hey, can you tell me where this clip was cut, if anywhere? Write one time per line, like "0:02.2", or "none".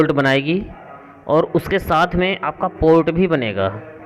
none